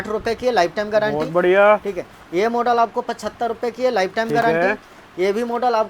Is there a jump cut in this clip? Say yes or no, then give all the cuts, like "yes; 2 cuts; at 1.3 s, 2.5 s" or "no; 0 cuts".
no; 0 cuts